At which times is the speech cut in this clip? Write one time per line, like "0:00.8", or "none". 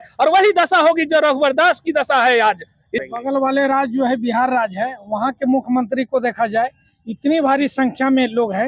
0:03.0